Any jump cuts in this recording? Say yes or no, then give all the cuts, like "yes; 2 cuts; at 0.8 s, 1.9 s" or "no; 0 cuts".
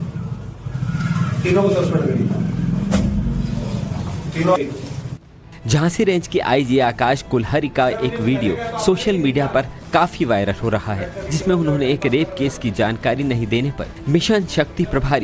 yes; 1 cut; at 12.9 s